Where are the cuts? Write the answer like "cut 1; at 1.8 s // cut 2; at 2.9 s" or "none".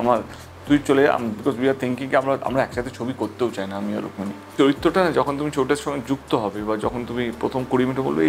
cut 1; at 4.5 s